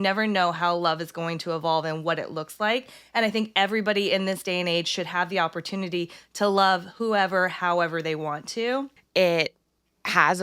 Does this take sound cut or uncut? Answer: cut